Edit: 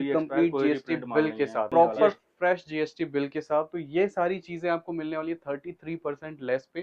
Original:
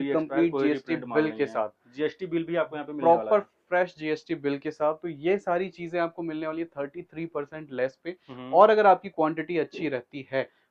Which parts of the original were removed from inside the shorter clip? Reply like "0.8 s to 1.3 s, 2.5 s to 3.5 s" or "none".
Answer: 1.7 s to 3.0 s